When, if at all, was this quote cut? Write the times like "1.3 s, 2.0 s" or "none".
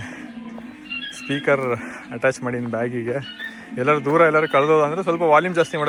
none